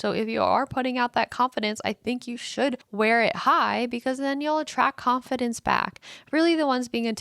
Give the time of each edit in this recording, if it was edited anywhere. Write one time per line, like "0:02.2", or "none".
0:02.8